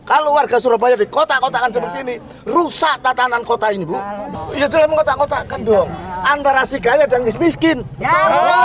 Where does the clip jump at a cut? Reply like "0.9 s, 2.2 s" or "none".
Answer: 4.3 s